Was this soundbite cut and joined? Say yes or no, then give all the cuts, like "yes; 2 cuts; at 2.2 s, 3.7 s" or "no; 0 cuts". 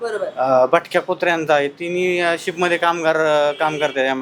no; 0 cuts